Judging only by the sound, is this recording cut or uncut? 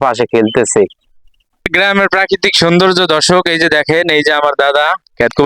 cut